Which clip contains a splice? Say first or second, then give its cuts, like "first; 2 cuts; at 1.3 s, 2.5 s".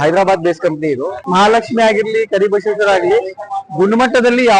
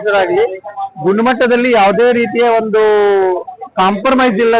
first; 1 cut; at 1.2 s